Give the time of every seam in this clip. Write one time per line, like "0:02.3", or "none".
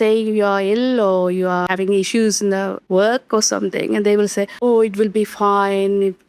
0:01.7
0:02.8
0:04.5

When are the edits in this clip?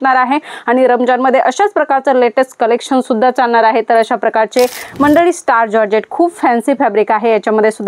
0:04.8

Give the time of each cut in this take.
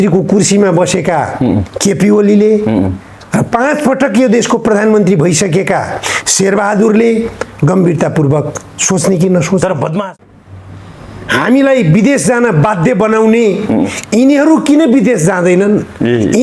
0:10.2

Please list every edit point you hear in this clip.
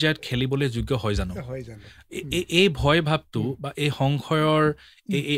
none

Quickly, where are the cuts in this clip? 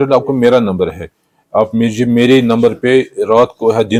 none

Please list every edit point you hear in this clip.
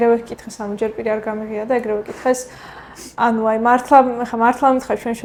none

